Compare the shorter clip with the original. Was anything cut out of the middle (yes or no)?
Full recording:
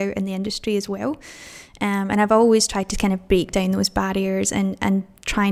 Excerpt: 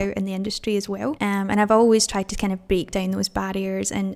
yes